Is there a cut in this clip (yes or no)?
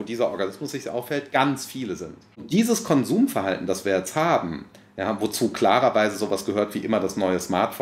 yes